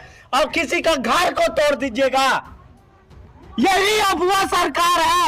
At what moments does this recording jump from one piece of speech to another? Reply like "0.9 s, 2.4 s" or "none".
none